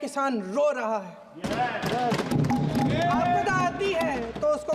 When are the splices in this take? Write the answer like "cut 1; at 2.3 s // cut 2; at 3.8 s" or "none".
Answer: none